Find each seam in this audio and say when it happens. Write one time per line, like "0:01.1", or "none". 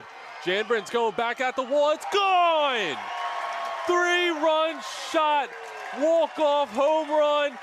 none